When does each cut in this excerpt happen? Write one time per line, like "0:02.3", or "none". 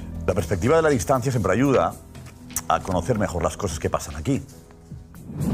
none